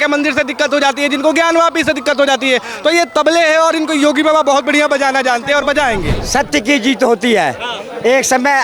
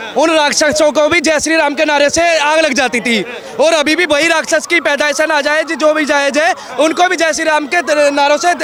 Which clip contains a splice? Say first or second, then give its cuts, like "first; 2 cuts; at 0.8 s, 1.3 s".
first; 1 cut; at 6.2 s